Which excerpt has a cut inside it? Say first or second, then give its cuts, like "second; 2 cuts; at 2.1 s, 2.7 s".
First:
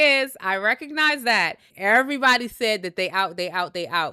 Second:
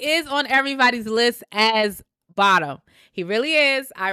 first; 1 cut; at 1.6 s